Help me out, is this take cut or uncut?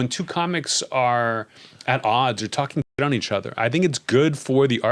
uncut